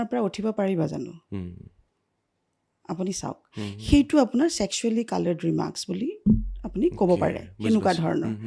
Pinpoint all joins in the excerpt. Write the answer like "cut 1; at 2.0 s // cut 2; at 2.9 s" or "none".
none